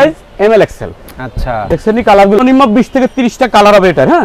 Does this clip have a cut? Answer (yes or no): yes